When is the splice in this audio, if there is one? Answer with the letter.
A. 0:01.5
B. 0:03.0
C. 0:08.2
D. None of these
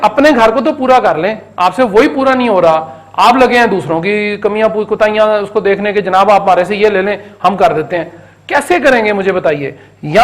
D